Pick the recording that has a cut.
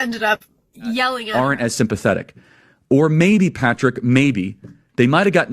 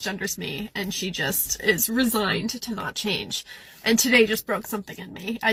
first; 1 cut; at 1.2 s

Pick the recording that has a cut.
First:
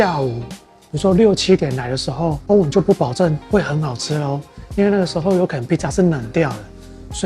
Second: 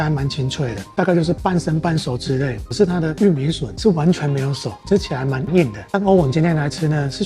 second; 3 cuts; at 1.0 s, 2.6 s, 5.8 s

